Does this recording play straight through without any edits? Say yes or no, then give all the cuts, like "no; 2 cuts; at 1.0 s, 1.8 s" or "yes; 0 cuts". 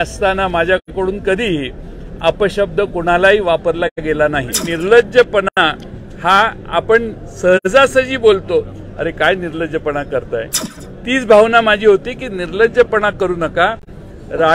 no; 1 cut; at 4.6 s